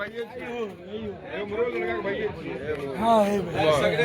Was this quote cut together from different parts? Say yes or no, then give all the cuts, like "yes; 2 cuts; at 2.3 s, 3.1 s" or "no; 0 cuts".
no; 0 cuts